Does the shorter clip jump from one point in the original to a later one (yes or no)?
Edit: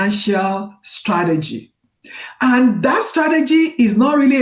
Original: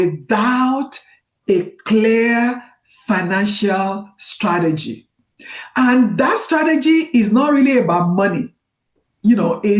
no